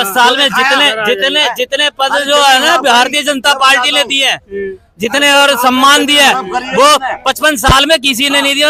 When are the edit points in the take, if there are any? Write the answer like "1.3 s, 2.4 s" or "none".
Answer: none